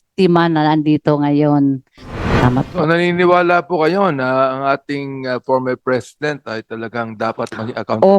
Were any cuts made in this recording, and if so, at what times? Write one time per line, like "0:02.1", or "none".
0:02.3